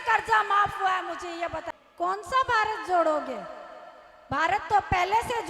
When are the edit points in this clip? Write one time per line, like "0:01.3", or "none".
0:01.7